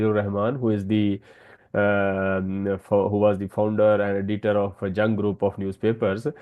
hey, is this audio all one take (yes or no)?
yes